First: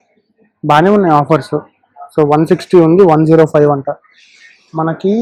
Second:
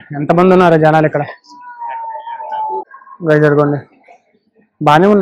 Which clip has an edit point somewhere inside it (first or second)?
second